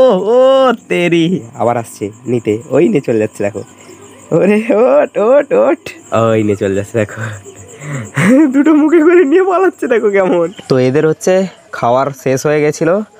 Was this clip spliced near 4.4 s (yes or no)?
no